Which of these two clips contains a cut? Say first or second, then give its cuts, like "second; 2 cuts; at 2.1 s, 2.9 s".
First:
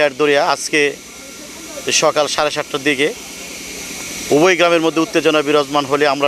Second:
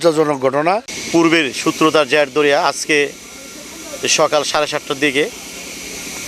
second; 1 cut; at 0.9 s